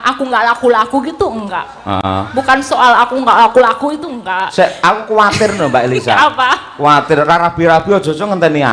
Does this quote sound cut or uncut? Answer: uncut